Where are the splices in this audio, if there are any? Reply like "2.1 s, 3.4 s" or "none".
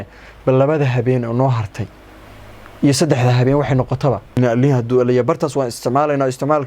4.4 s